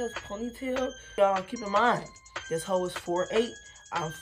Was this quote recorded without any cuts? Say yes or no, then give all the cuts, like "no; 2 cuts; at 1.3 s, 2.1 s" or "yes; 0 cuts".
no; 1 cut; at 1.0 s